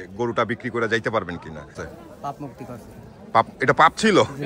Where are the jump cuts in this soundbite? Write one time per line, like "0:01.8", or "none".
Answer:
0:01.8

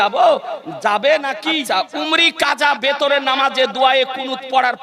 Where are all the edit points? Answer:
0:01.6

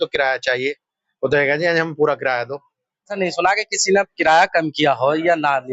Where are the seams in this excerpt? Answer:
0:03.1

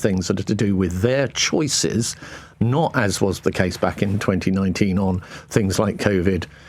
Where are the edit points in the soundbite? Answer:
none

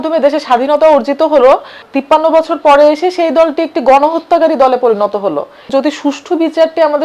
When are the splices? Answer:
0:01.9
0:05.7

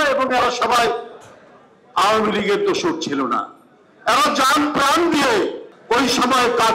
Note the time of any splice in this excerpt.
0:05.7

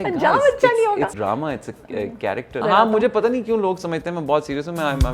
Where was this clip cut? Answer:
0:01.1
0:02.6

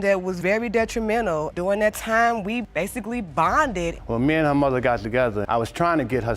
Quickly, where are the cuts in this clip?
0:03.9

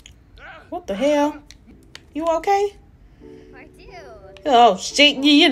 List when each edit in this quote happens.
0:01.7

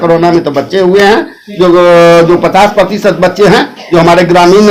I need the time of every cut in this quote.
none

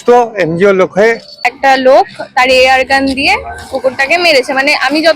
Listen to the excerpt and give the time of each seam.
0:01.5

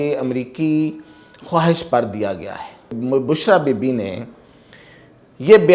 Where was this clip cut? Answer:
0:03.0

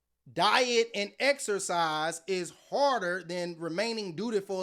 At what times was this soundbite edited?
none

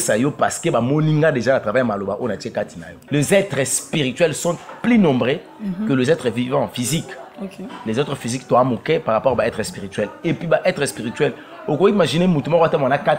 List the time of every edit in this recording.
0:02.9

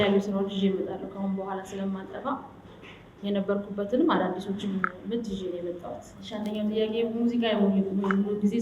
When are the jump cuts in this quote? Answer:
0:06.1

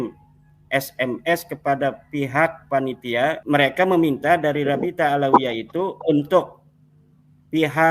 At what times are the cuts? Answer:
0:03.4

